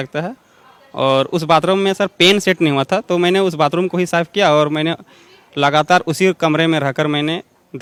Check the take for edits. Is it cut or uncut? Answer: uncut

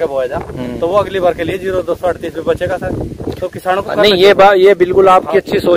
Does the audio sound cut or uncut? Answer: uncut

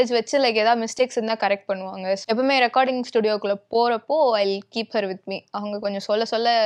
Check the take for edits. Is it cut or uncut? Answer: cut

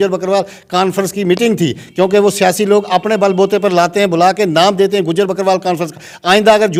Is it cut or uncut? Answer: uncut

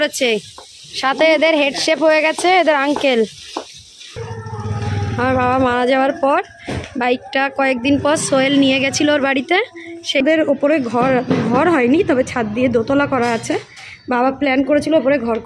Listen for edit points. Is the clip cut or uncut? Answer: cut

